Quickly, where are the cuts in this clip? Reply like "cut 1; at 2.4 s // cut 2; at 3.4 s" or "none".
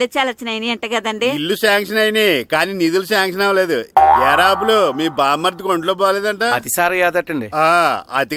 none